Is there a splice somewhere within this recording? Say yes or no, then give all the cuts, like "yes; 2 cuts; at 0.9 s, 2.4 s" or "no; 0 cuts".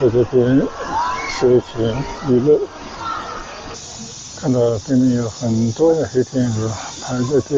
yes; 1 cut; at 3.7 s